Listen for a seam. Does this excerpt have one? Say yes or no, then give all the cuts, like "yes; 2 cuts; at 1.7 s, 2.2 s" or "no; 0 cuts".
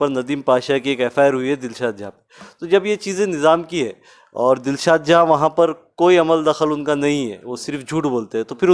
no; 0 cuts